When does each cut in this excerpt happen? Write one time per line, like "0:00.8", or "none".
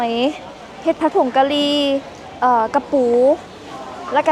none